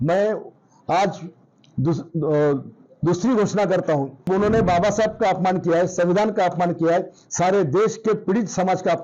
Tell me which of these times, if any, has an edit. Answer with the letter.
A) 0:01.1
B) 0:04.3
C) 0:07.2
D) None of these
B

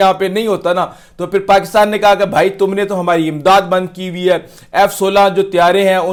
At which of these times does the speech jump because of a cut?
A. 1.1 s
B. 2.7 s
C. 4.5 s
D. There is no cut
D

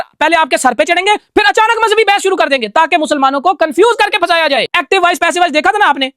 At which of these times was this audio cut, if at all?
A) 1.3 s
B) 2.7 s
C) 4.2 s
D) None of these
D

